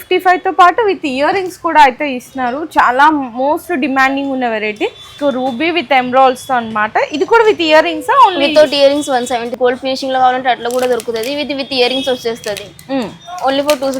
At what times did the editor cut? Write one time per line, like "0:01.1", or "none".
0:05.1
0:09.5

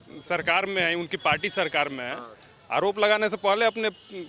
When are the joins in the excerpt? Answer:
none

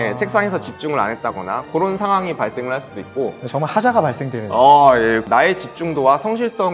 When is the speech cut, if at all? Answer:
0:05.2

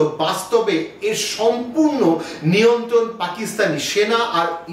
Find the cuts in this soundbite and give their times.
none

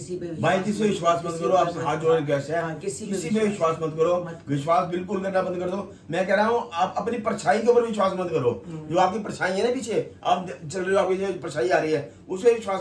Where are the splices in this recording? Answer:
none

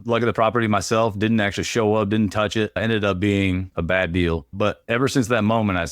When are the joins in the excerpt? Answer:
0:04.5

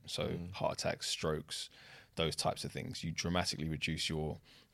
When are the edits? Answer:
none

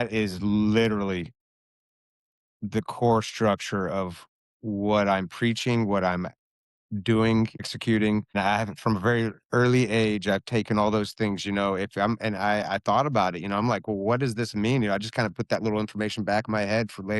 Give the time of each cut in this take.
none

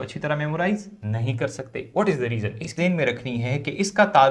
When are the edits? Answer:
0:02.8

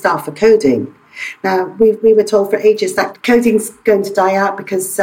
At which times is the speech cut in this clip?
0:03.1

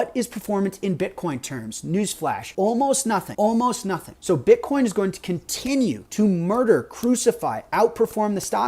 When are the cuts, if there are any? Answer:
0:02.5
0:03.3
0:04.1
0:06.0

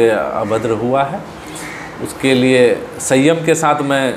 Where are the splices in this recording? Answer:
none

